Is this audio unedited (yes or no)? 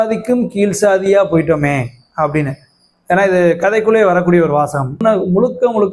no